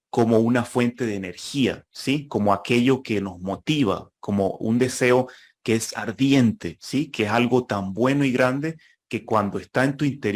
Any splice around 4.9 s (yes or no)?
no